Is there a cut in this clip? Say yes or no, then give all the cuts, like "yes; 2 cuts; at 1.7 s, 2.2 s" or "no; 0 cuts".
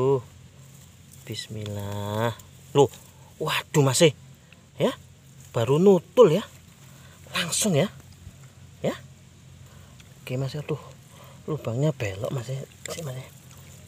no; 0 cuts